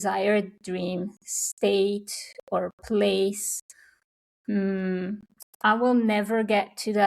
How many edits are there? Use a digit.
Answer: 0